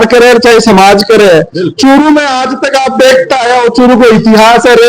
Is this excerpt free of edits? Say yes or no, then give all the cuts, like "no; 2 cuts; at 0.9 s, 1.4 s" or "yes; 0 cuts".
yes; 0 cuts